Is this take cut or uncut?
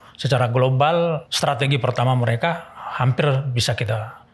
cut